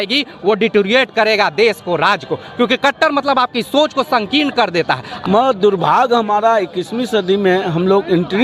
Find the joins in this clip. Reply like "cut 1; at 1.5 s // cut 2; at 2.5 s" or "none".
cut 1; at 5.1 s